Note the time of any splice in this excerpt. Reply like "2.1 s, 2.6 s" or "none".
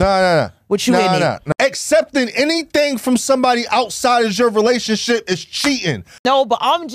1.4 s, 6.2 s